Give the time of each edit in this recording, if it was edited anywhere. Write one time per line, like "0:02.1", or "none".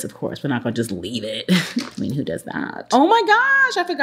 none